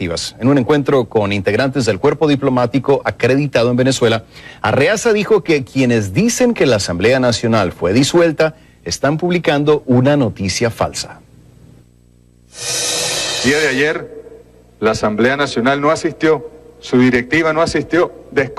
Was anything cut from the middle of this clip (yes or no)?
yes